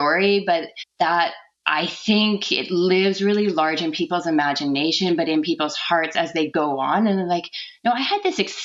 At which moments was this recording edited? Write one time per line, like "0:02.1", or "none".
none